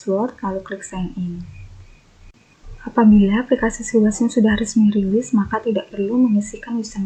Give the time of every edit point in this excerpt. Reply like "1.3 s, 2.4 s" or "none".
none